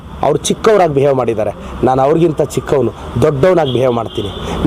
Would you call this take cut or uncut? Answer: uncut